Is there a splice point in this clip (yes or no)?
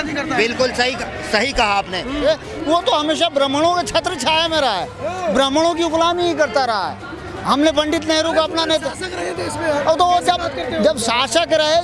yes